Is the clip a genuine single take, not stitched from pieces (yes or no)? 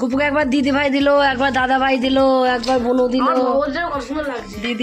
yes